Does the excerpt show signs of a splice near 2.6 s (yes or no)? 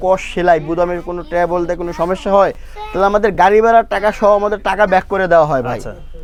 no